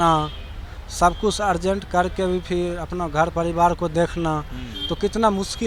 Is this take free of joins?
yes; 0 cuts

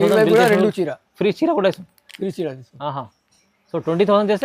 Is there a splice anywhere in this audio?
no; 0 cuts

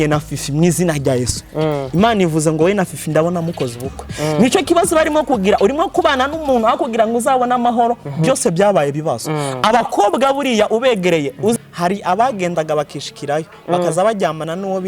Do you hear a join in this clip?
yes; 1 cut; at 11.6 s

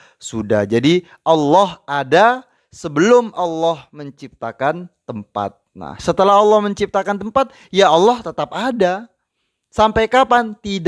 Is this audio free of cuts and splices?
yes; 0 cuts

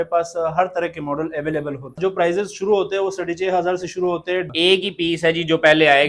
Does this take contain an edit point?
yes; 2 cuts; at 2.0 s, 4.5 s

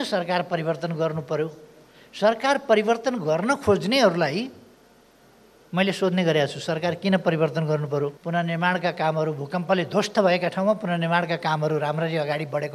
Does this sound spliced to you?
no; 0 cuts

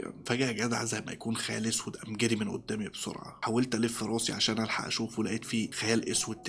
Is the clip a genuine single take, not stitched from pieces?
yes; 0 cuts

